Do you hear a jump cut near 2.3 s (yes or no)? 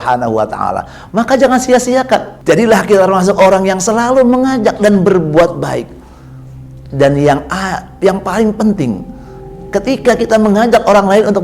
yes